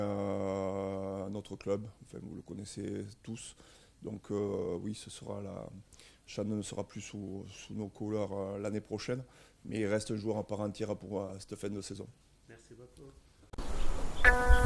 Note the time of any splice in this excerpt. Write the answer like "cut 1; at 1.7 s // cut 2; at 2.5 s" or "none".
cut 1; at 13.4 s